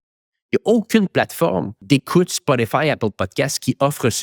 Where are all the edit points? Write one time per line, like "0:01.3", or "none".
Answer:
0:01.7